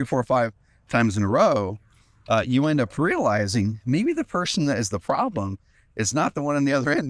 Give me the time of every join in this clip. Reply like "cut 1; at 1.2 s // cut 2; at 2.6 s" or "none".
none